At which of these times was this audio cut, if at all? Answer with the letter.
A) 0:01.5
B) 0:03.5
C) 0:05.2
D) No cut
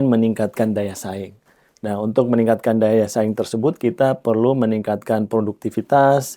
D